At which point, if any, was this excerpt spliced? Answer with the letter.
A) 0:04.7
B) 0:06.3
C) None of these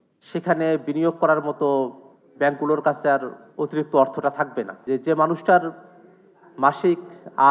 A